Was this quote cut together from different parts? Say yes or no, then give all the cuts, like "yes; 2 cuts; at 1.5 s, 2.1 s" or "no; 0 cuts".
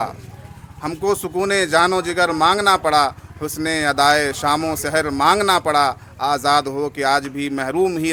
no; 0 cuts